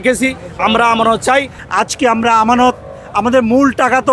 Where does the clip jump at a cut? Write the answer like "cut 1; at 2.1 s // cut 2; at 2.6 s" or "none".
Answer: cut 1; at 1.6 s